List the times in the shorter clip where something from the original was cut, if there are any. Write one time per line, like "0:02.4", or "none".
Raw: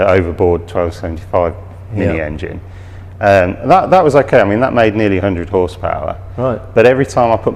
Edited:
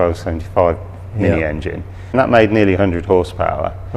0:02.1